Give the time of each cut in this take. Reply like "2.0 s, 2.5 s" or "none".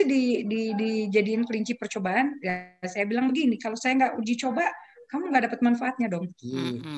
none